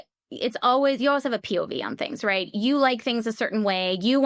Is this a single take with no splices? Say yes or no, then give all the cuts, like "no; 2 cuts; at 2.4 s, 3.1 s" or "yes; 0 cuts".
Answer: yes; 0 cuts